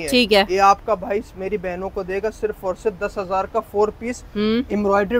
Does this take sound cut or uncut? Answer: uncut